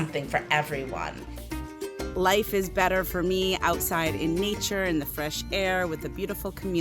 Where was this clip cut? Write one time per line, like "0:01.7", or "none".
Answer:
0:01.7